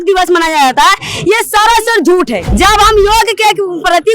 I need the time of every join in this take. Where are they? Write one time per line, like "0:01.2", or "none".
0:02.4